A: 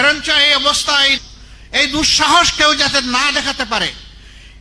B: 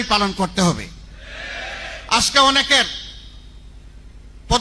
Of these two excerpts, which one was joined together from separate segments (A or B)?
A